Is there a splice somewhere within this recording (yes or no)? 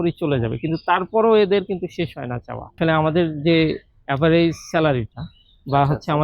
yes